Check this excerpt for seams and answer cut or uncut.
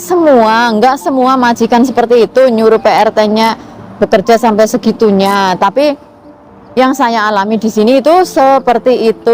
uncut